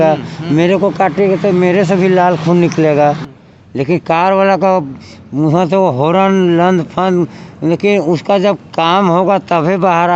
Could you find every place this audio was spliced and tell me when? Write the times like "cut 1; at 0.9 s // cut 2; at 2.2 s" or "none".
cut 1; at 3.3 s